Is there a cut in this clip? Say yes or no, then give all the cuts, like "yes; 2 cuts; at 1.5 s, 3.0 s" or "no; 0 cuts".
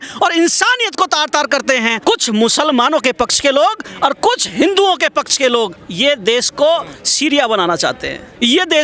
yes; 1 cut; at 5.7 s